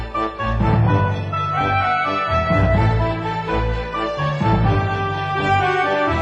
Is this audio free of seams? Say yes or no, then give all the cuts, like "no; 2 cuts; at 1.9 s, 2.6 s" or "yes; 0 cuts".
yes; 0 cuts